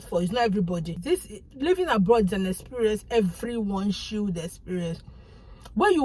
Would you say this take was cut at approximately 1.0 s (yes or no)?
yes